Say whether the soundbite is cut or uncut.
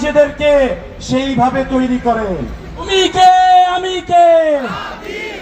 cut